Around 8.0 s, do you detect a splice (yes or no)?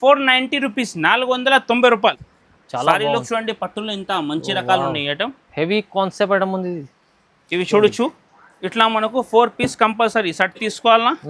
no